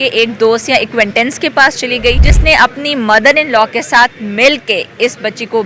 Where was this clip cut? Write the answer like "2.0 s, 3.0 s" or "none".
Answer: 2.3 s